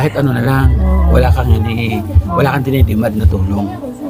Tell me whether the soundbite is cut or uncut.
uncut